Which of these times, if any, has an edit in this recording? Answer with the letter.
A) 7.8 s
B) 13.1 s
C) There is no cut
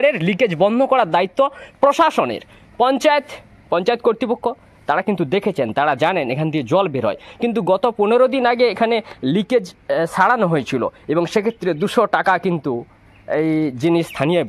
C